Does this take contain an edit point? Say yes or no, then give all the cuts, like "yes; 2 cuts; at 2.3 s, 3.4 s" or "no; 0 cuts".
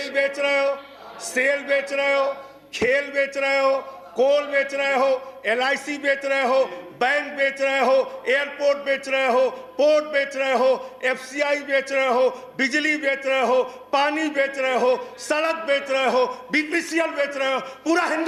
no; 0 cuts